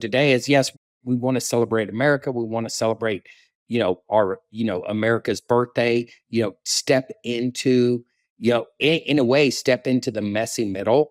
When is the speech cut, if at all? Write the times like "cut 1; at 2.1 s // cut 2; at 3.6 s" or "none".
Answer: none